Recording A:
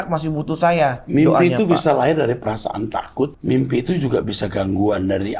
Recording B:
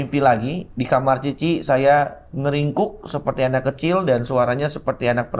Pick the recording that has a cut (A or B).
A